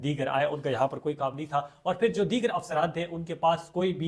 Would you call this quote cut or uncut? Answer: uncut